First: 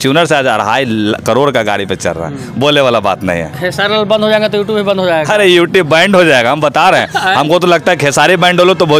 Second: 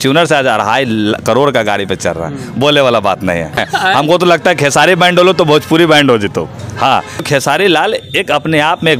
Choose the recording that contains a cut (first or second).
second